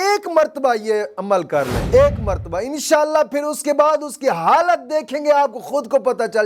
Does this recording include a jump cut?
no; 0 cuts

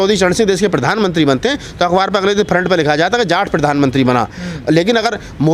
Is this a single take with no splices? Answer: yes; 0 cuts

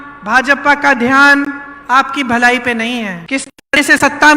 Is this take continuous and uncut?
no; 1 cut; at 3.2 s

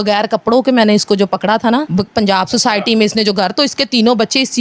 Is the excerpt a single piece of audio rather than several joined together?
yes; 0 cuts

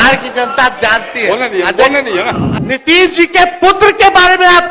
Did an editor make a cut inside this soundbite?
yes; 1 cut; at 2.5 s

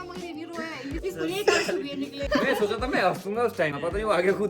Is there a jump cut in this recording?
yes; 3 cuts; at 1.0 s, 2.2 s, 3.7 s

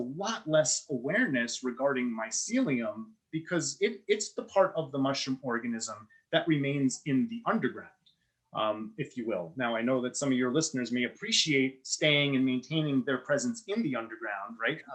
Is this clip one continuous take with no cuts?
yes; 0 cuts

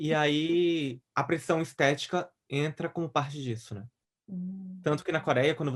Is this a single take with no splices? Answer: yes; 0 cuts

